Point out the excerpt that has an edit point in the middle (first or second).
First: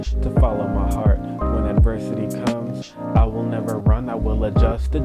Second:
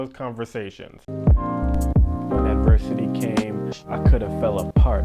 second